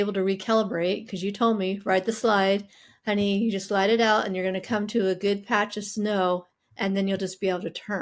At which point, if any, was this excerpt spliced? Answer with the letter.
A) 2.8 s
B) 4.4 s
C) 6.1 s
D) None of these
D